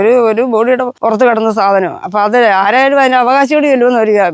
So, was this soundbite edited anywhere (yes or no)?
yes